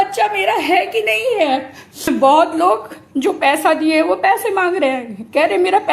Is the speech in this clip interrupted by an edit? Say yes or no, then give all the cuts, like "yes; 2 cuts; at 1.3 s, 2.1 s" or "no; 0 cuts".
yes; 1 cut; at 2.1 s